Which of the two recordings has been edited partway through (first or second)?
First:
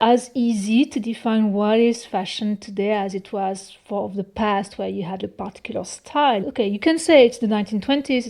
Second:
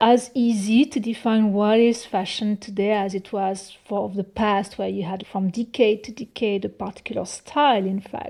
first